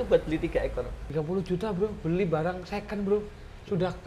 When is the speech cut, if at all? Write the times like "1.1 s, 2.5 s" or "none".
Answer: 1.0 s

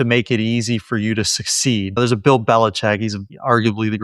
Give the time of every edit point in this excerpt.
2.0 s

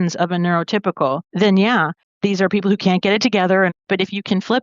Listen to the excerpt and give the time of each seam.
1.3 s, 2.0 s, 3.8 s

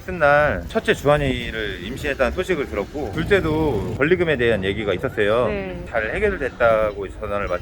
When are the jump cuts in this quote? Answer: 3.1 s, 3.9 s

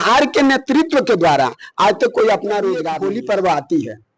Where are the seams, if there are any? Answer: 2.9 s

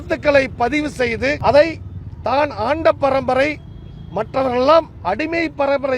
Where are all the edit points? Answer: 1.4 s

